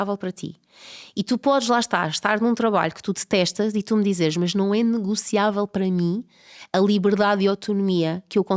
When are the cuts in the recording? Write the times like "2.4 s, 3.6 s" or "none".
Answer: none